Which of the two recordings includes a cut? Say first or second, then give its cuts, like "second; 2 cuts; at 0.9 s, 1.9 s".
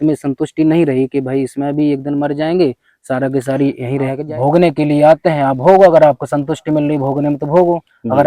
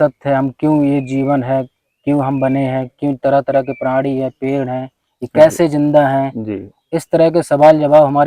first; 1 cut; at 4.2 s